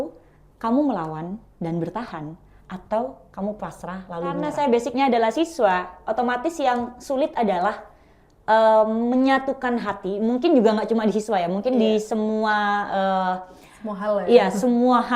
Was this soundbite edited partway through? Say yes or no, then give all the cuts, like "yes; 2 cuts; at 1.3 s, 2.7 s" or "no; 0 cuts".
yes; 1 cut; at 4.4 s